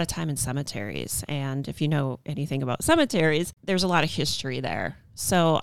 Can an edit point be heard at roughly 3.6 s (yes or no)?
yes